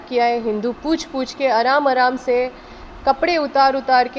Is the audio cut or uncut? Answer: uncut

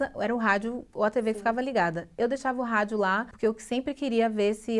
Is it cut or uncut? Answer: cut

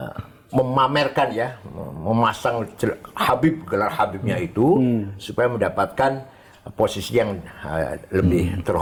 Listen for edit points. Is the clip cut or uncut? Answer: uncut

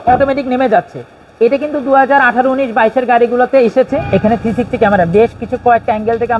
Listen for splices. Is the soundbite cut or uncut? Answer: cut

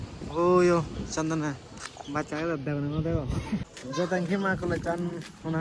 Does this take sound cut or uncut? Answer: cut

